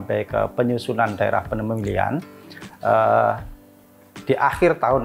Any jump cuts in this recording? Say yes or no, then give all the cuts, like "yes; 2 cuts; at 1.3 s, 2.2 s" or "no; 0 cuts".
no; 0 cuts